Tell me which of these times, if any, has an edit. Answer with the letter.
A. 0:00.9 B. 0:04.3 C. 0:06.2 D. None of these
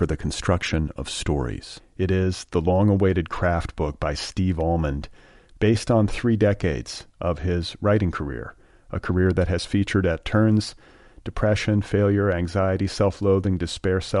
D